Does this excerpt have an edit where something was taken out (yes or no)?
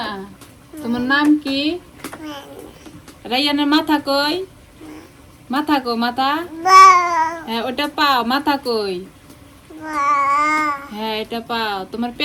no